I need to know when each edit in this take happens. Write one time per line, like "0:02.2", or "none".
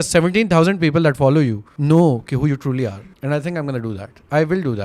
0:01.7
0:02.9